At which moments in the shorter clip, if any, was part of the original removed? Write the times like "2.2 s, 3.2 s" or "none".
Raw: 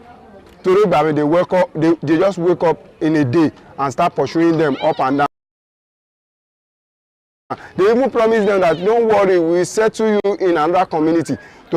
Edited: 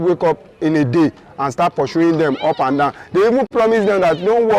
3.5 s